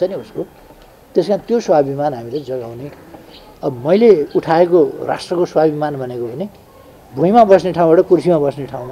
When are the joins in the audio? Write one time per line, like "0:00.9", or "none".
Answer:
none